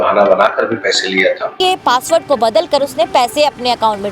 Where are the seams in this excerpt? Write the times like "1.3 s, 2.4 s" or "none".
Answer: 1.5 s